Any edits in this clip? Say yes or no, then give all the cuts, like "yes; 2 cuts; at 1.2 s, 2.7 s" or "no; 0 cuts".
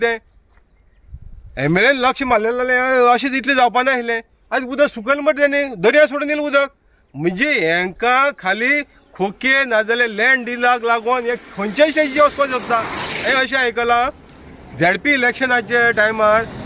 yes; 1 cut; at 13.2 s